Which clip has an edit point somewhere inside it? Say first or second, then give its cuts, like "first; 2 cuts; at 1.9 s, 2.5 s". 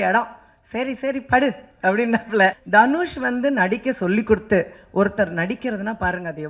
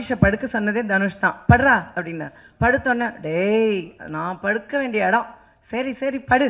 first; 1 cut; at 2.6 s